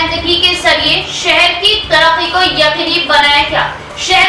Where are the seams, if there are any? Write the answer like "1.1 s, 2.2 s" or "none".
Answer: none